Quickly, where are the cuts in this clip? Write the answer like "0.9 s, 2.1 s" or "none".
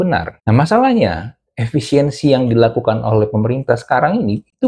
none